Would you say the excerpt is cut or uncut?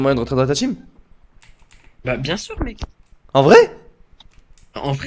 uncut